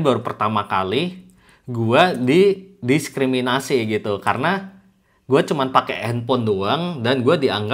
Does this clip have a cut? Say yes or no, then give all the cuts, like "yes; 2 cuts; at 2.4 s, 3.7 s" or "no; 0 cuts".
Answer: no; 0 cuts